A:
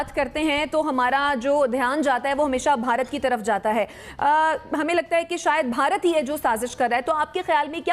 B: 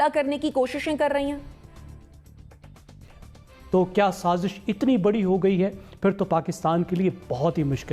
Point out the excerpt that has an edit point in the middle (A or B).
B